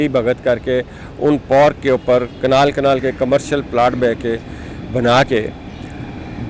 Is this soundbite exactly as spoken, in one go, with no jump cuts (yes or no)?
yes